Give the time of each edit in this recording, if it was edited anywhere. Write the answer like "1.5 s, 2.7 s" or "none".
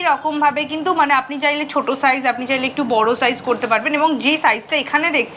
none